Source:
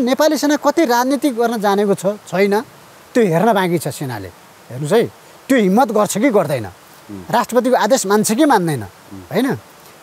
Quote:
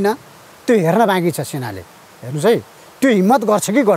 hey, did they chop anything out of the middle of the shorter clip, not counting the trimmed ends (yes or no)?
no